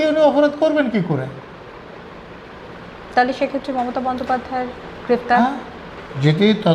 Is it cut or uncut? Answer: uncut